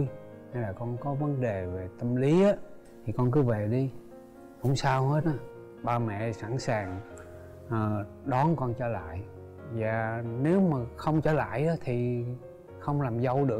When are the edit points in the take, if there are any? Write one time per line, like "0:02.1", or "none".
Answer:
none

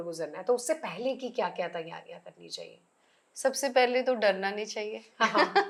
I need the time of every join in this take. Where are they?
none

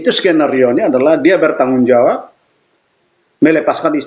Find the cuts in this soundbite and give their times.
none

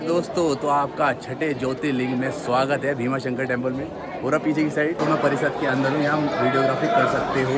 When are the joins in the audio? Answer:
0:05.0

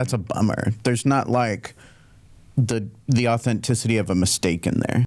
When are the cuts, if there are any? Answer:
none

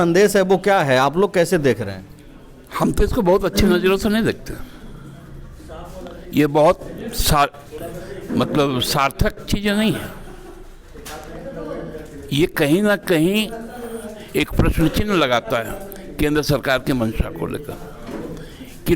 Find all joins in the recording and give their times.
none

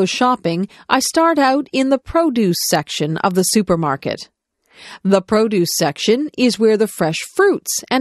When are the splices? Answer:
none

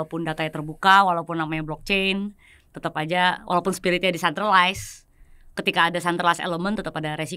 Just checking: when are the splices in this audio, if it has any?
none

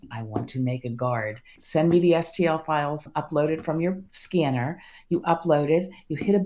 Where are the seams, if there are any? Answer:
0:03.1
0:04.1

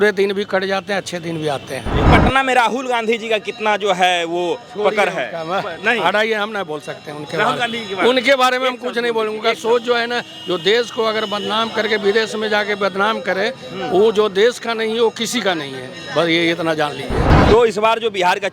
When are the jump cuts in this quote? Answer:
0:02.1
0:17.3

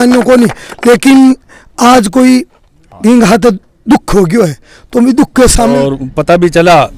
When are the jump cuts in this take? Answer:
0:05.8

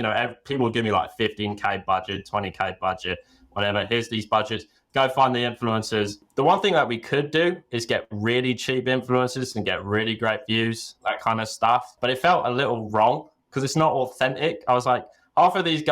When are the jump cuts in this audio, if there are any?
0:06.2
0:11.9

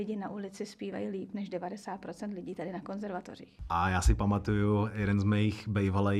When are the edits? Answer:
0:03.5

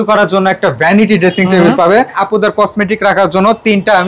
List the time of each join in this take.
0:02.2

